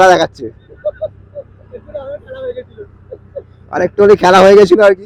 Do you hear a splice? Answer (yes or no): no